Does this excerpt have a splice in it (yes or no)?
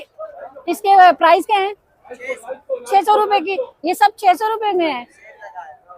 no